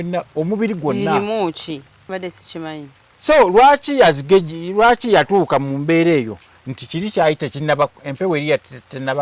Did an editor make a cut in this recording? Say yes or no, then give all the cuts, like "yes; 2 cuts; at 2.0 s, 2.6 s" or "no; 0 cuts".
yes; 1 cut; at 2.1 s